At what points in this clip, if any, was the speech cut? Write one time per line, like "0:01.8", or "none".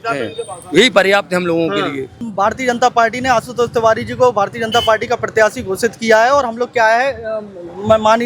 0:02.3